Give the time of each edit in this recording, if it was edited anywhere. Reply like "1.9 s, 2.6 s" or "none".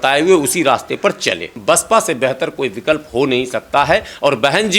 1.5 s